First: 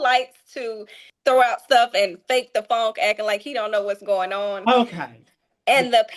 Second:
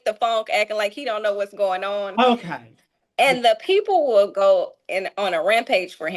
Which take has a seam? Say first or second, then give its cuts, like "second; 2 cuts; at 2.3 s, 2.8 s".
first; 1 cut; at 1.0 s